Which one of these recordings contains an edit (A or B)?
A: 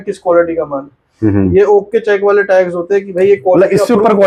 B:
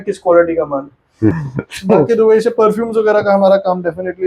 B